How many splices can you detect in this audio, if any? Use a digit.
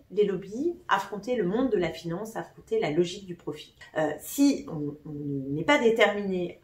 1